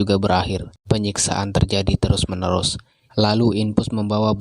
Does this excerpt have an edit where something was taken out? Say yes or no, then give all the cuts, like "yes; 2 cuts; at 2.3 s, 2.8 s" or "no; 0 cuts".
yes; 1 cut; at 3.0 s